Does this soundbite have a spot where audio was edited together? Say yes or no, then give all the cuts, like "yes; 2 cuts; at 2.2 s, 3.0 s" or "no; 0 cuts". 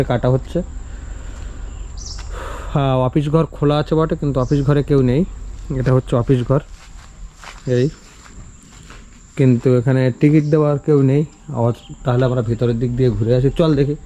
no; 0 cuts